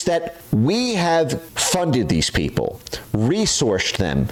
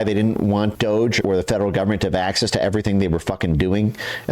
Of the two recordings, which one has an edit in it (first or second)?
second